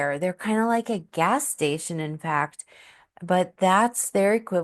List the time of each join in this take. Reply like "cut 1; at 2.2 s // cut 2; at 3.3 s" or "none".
none